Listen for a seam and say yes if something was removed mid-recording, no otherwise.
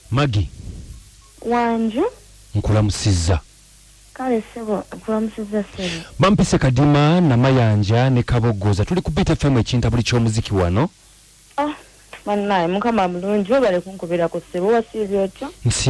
no